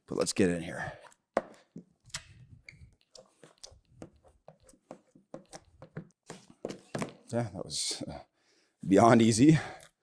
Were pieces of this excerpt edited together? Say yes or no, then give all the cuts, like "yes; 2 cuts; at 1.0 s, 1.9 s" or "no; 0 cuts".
yes; 1 cut; at 6.1 s